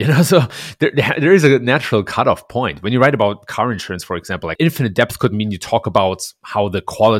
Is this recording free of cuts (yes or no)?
yes